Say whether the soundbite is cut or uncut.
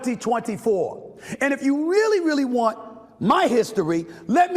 cut